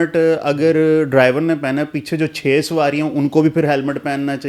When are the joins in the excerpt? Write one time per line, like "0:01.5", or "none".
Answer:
none